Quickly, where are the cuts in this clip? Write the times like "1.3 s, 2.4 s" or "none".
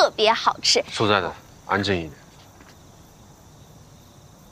3.6 s

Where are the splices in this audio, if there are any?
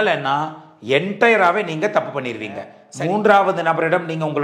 2.8 s

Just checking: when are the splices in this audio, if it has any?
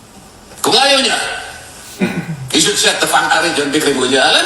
3.4 s

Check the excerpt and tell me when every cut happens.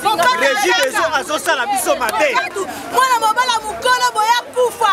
2.5 s

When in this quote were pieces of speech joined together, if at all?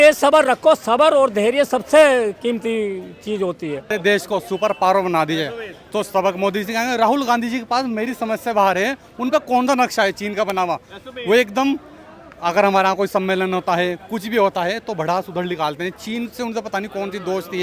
3.9 s

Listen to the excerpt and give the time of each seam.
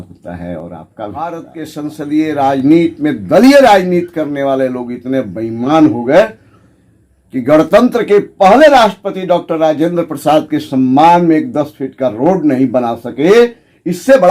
1.2 s

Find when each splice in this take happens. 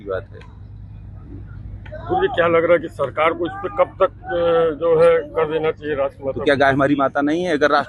6.3 s

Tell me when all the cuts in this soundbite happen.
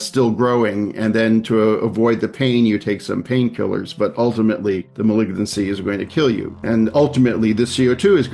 4.9 s, 6.5 s

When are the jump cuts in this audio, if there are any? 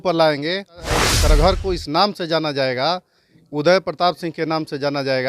0.9 s

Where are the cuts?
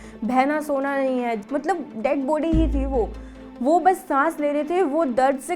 1.4 s

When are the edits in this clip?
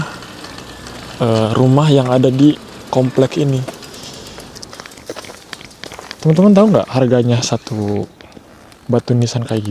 4.7 s

